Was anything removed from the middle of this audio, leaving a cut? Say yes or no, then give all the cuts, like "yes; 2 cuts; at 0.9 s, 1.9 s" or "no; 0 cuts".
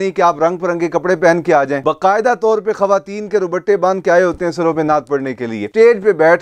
yes; 2 cuts; at 1.8 s, 5.6 s